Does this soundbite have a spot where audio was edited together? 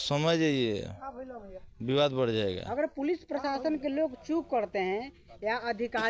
no; 0 cuts

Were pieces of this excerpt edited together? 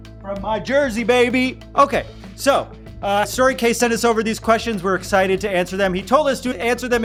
no; 0 cuts

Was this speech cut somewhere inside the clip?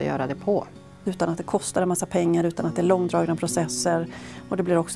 yes; 1 cut; at 1.0 s

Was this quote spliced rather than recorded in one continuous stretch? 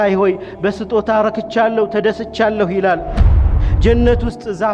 yes; 1 cut; at 3.3 s

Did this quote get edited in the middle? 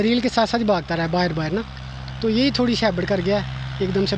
no; 0 cuts

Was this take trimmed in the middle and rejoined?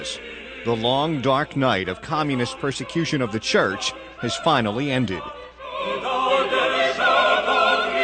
yes; 1 cut; at 4.8 s

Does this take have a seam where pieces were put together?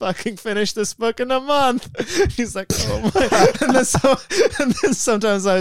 no; 0 cuts

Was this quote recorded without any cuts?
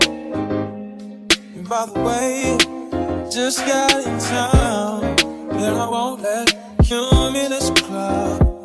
yes; 0 cuts

